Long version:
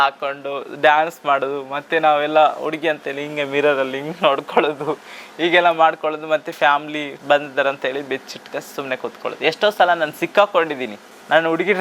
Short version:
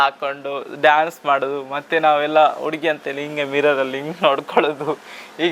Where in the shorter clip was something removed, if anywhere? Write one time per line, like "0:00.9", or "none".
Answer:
none